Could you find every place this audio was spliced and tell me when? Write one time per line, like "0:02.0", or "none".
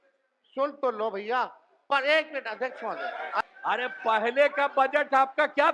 0:03.4

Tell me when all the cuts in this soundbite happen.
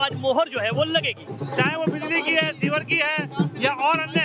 0:01.3

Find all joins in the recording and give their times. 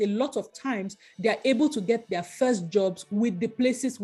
none

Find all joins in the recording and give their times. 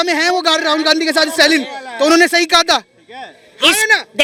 none

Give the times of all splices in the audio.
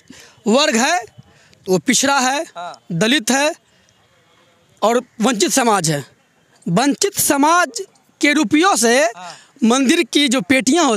none

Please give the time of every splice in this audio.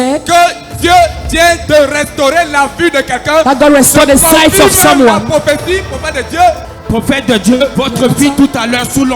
0:06.7
0:07.7

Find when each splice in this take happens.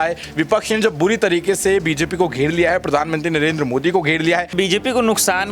0:04.5

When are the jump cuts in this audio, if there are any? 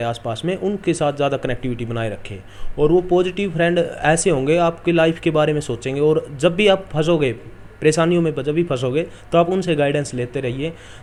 none

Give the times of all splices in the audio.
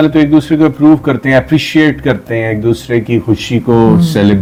none

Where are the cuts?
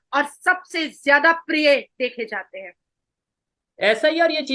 none

